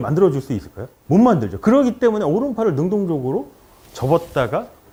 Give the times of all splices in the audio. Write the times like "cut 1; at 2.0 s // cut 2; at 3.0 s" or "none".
none